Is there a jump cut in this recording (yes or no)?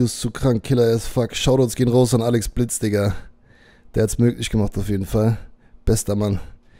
no